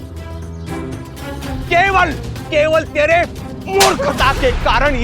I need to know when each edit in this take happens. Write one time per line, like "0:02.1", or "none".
0:01.6